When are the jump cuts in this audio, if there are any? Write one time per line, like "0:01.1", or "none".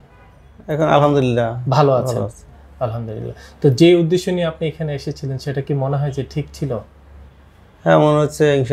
none

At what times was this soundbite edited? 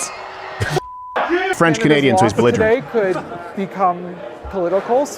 0:01.5

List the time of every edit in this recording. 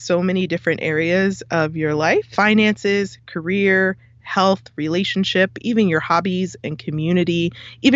0:02.3

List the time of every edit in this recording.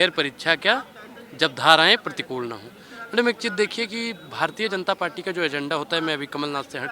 none

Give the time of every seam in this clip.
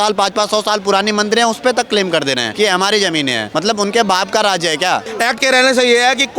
0:02.5
0:03.4
0:05.1

